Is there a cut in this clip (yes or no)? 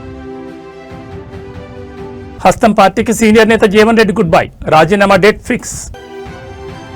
no